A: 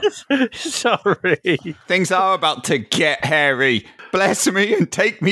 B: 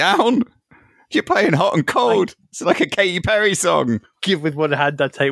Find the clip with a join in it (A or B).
A